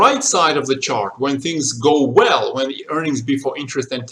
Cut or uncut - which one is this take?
uncut